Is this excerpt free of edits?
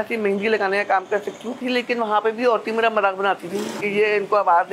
no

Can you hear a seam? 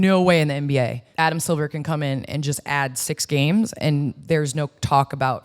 yes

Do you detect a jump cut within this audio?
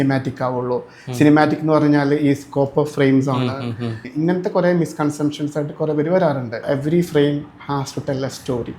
yes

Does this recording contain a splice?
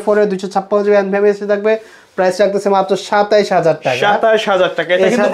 no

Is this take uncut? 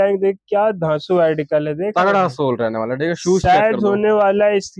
yes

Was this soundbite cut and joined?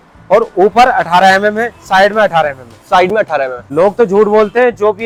no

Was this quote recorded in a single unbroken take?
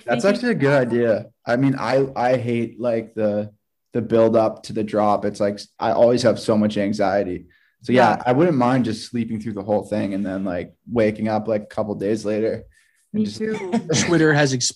no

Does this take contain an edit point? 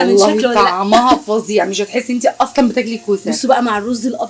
no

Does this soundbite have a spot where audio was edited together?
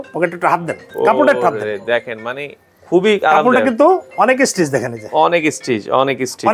no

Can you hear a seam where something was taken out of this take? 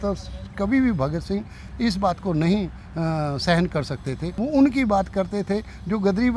yes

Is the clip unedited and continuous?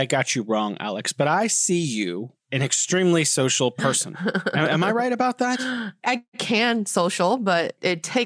yes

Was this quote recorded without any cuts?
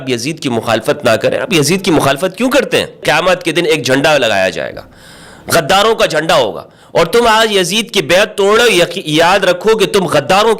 no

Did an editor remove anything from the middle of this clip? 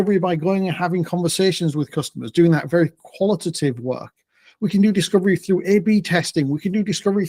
no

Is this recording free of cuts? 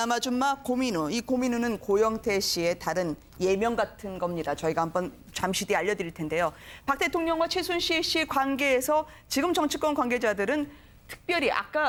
yes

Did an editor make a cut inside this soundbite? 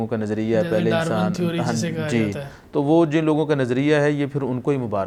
no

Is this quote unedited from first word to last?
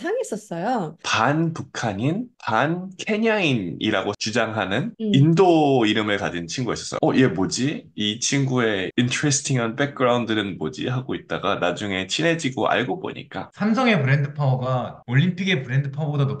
no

